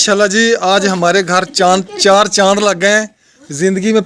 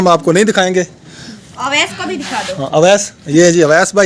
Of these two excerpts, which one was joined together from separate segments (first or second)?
second